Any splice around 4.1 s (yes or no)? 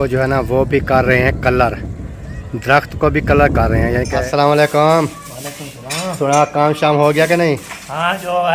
yes